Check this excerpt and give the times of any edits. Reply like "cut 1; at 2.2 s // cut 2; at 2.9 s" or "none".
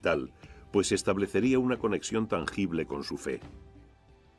cut 1; at 1.4 s